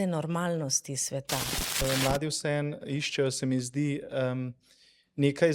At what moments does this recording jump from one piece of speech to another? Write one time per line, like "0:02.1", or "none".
0:01.8